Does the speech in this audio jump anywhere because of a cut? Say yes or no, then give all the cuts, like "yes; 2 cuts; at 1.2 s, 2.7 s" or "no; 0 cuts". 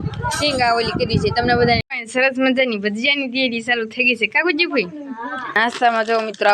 yes; 2 cuts; at 1.9 s, 5.4 s